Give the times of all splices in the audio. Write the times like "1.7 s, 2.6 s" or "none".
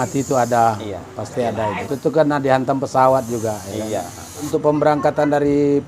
1.4 s, 4.5 s

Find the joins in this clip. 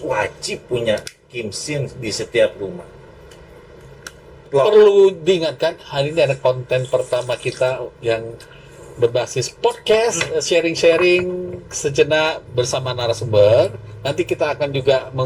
4.4 s

